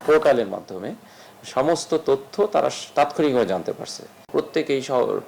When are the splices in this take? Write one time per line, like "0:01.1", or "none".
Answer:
0:04.3